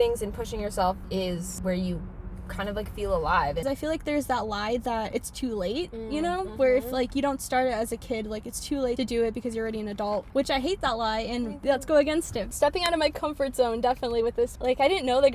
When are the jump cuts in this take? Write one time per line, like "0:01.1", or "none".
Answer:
0:03.6
0:05.1
0:09.0
0:10.3
0:11.5
0:12.5
0:14.6